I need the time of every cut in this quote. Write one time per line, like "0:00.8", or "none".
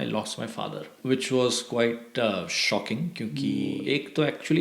0:01.0
0:03.8

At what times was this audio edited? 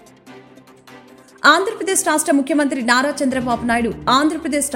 none

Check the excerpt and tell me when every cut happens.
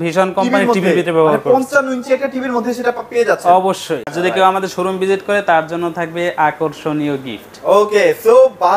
0:04.1

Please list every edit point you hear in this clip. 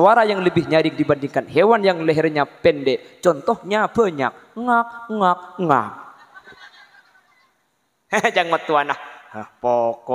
none

